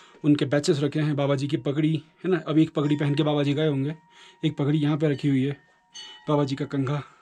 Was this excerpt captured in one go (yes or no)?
yes